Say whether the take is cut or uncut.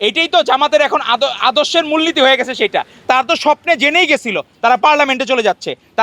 cut